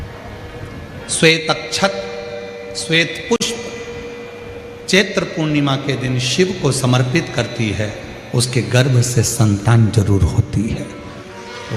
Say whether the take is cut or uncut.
uncut